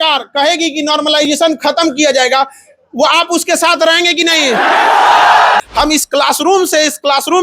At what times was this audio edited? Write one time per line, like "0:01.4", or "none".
0:05.6